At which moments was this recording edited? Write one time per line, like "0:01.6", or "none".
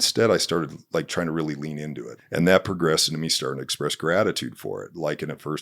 0:02.1